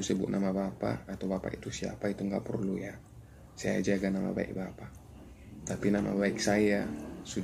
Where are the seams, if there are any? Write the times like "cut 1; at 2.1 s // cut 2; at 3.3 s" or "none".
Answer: none